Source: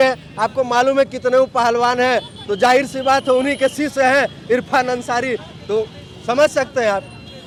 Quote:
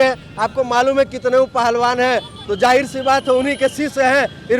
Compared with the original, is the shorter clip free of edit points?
yes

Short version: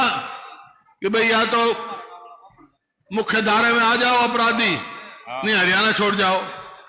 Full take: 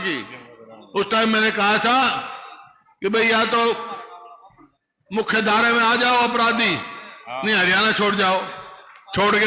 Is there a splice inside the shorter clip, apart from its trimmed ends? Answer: no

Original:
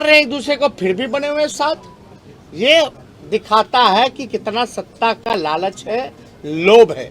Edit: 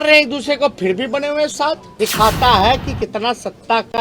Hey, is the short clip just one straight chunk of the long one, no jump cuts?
no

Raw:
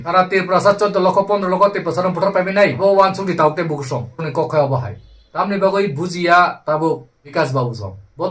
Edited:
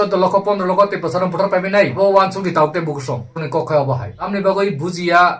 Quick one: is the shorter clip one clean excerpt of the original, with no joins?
no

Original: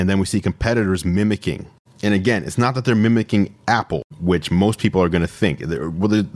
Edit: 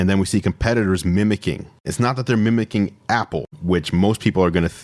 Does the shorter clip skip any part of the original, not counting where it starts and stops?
yes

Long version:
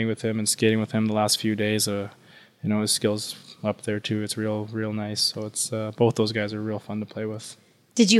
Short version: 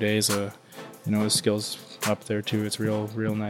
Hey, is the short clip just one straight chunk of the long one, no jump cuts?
yes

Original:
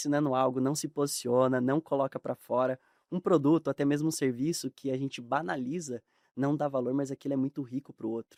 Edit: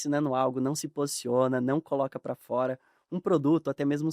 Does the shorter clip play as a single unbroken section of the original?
yes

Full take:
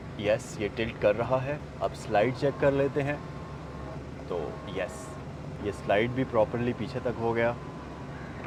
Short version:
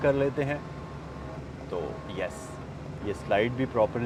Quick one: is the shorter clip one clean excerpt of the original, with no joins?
yes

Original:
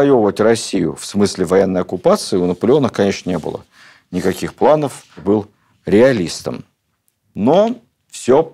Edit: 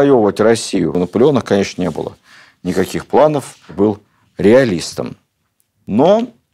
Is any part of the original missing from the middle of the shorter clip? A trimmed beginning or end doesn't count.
yes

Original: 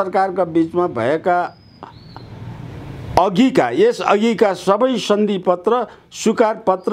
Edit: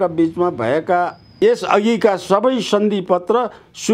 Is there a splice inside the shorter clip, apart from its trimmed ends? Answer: yes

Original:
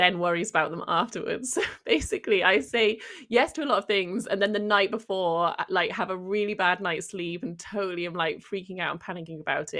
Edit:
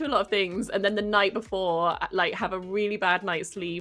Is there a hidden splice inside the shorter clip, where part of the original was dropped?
no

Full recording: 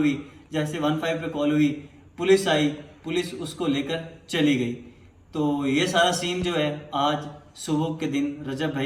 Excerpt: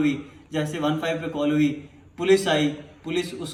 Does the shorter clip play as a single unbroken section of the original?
yes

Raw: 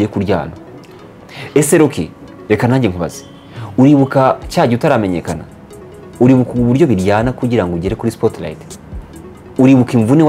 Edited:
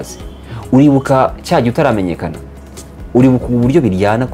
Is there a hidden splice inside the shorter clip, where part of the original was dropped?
no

